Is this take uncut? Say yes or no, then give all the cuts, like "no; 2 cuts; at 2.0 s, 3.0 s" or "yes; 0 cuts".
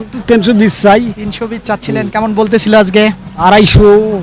yes; 0 cuts